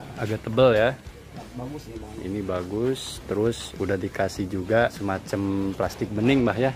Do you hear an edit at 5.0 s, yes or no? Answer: yes